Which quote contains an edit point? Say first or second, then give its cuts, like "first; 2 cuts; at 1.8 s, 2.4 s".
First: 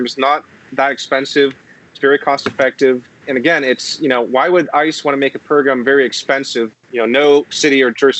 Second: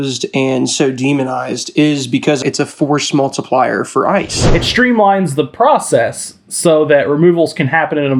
second; 2 cuts; at 2.4 s, 4.6 s